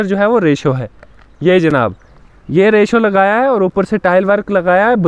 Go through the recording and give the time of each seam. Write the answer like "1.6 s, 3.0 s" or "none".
none